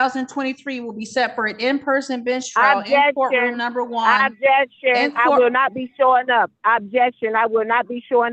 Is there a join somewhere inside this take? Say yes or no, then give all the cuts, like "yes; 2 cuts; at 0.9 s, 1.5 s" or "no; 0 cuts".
no; 0 cuts